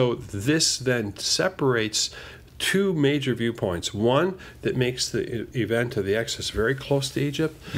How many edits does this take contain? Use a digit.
0